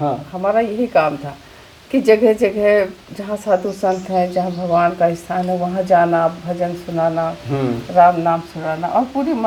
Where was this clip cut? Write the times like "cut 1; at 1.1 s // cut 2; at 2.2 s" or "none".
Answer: none